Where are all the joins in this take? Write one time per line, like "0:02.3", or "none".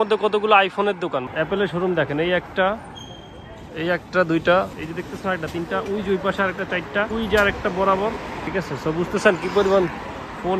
0:01.2
0:04.7
0:07.1
0:08.4